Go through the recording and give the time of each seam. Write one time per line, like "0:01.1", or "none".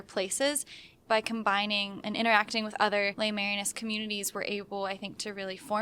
0:00.9
0:02.0
0:03.1